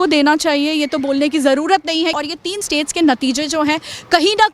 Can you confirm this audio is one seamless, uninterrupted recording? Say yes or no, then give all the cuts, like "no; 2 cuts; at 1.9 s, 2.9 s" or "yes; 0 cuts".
no; 1 cut; at 2.2 s